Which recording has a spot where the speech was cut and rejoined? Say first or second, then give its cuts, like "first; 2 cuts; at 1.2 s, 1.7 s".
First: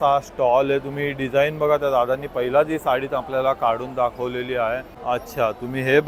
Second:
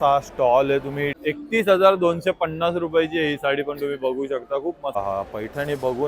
second; 2 cuts; at 1.1 s, 5.0 s